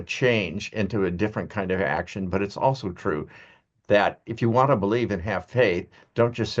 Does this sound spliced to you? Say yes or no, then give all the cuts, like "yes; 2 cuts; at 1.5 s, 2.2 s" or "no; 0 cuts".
no; 0 cuts